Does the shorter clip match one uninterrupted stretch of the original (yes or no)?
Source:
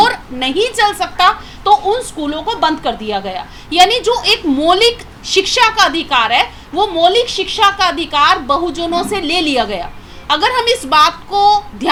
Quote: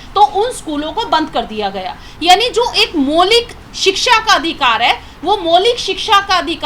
yes